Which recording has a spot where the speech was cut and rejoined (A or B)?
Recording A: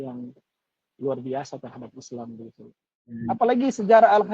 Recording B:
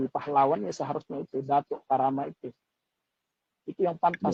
A